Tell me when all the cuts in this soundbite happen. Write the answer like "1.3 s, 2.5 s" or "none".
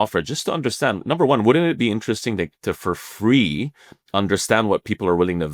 none